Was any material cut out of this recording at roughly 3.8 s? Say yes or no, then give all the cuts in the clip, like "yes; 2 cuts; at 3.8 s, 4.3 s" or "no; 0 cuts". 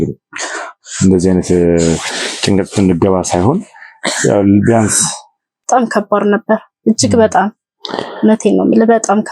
no; 1 cut; at 5.6 s